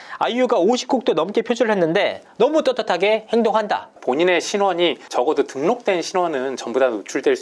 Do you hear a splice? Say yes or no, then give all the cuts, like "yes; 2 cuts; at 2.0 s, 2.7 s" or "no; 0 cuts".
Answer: yes; 1 cut; at 3.9 s